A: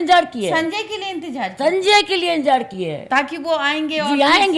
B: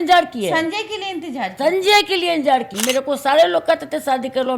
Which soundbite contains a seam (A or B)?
B